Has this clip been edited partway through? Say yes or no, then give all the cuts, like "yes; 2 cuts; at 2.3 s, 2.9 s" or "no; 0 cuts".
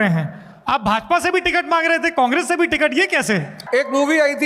yes; 1 cut; at 3.6 s